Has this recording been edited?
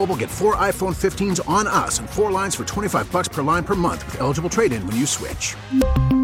no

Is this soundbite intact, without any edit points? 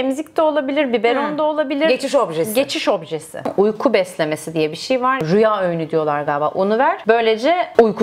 no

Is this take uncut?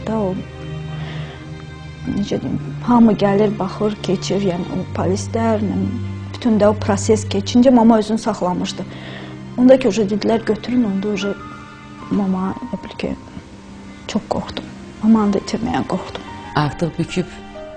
yes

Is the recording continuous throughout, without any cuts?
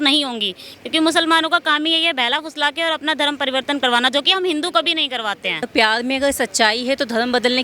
no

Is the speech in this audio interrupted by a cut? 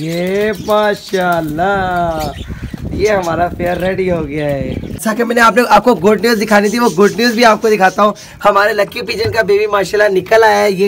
no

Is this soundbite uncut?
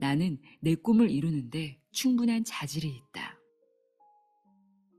no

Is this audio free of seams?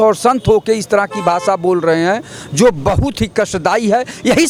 yes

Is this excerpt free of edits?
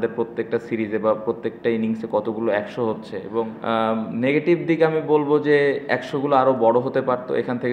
no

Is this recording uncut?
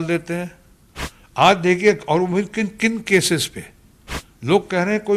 yes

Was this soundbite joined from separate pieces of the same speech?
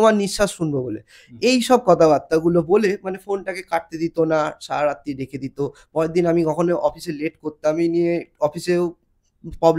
no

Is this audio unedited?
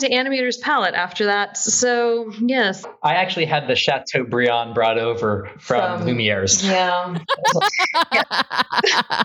no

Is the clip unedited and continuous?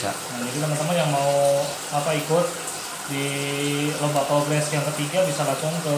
yes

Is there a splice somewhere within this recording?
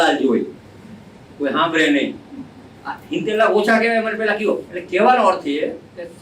yes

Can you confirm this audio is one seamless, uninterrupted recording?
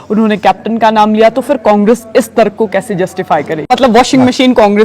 no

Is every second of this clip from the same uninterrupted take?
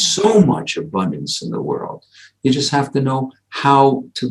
yes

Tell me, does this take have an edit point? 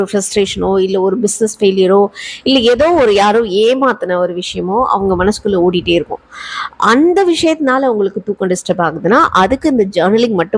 no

